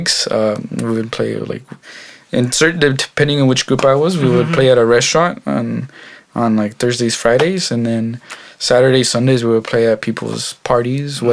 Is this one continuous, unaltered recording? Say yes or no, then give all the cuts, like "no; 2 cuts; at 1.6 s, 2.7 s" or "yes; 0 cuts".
yes; 0 cuts